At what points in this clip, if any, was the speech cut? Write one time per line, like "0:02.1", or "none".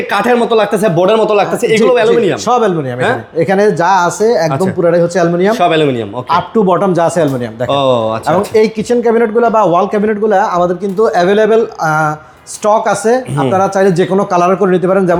none